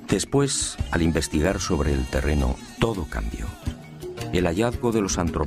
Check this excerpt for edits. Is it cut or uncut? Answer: uncut